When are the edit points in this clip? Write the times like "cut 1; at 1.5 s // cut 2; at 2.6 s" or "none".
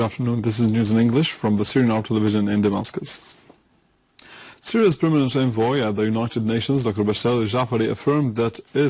cut 1; at 1.8 s